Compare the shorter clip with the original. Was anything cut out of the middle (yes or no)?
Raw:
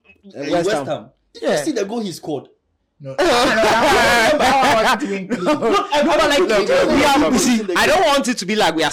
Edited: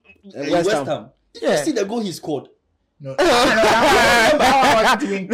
no